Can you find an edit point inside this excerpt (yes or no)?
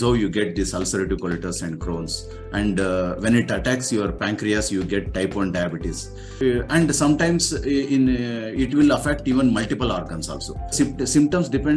yes